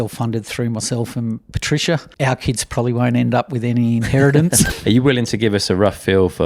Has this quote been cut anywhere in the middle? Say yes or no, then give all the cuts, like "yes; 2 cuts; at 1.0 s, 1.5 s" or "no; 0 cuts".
yes; 2 cuts; at 2.1 s, 4.7 s